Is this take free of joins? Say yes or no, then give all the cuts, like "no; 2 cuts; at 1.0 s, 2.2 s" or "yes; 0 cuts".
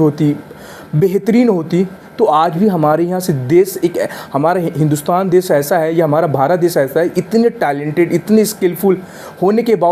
yes; 0 cuts